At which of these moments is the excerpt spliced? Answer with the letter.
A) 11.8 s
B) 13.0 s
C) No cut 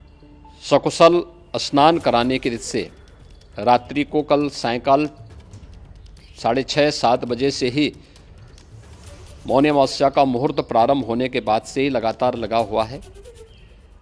B